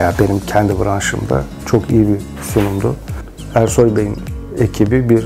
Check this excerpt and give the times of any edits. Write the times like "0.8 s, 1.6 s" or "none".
3.4 s